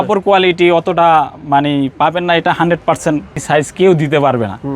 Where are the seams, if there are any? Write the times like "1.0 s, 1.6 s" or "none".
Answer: 3.4 s